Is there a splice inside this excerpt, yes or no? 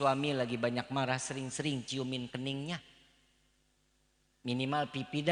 no